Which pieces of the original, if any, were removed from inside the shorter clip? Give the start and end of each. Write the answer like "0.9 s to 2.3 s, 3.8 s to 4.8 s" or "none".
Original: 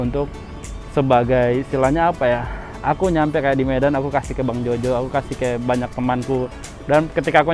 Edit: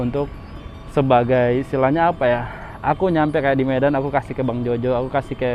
none